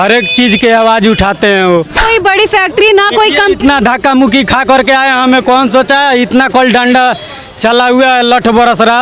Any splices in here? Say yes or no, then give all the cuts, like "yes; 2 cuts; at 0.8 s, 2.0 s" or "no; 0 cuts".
yes; 1 cut; at 2.0 s